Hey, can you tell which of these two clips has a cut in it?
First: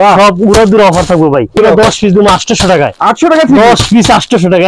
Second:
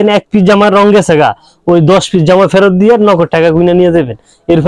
first; 1 cut; at 1.5 s

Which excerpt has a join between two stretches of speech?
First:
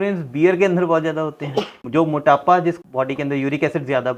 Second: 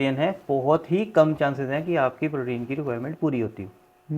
first; 2 cuts; at 1.8 s, 2.8 s

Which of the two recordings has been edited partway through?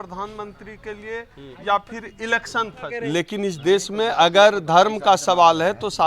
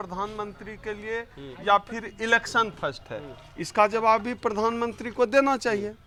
first; 1 cut; at 2.9 s

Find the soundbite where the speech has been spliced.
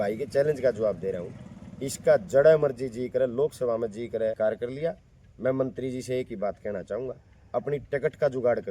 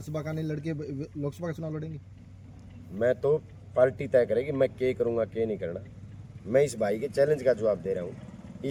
first; 1 cut; at 4.4 s

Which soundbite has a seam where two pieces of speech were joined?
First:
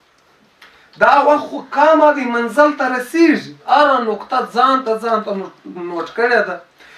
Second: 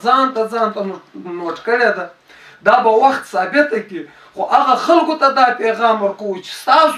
first; 1 cut; at 3.6 s

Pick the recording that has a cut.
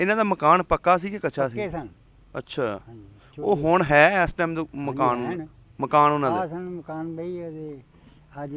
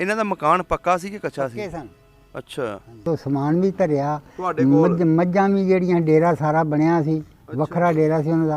second; 1 cut; at 3.0 s

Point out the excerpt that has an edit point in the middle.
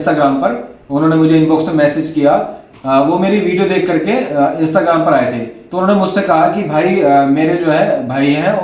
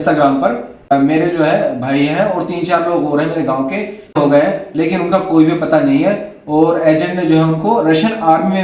second; 2 cuts; at 0.9 s, 4.1 s

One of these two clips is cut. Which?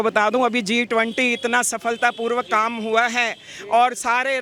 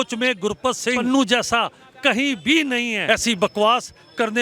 second; 2 cuts; at 1.0 s, 3.0 s

